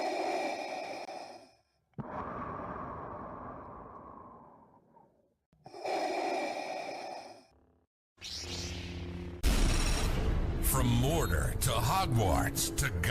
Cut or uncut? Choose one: cut